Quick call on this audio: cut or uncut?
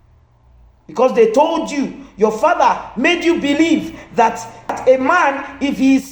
cut